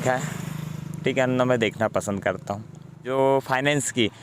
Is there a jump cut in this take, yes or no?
yes